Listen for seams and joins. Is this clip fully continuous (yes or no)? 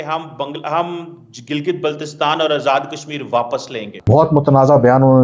no